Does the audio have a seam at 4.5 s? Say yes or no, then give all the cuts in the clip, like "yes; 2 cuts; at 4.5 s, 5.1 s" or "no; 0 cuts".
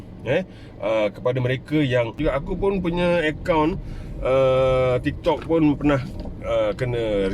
no; 1 cut; at 2.2 s